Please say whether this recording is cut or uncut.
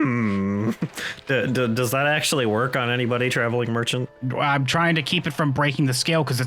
cut